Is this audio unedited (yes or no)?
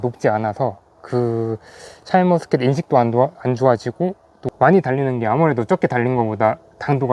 no